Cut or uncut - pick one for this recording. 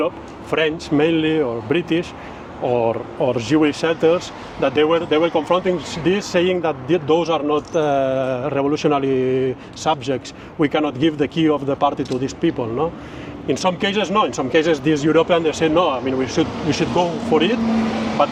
uncut